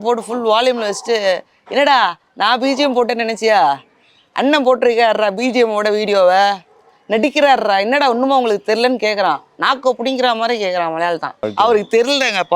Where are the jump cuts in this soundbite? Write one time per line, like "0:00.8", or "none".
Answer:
0:11.4